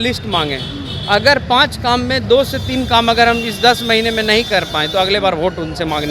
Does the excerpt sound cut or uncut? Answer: uncut